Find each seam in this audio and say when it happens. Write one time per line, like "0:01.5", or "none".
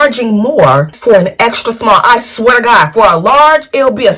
0:00.9